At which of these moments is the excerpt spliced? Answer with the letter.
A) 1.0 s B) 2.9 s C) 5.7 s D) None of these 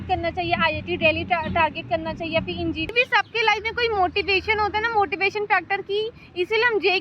B